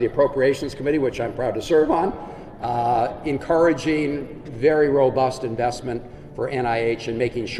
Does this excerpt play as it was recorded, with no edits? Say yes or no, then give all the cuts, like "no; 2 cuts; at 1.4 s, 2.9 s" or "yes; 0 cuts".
yes; 0 cuts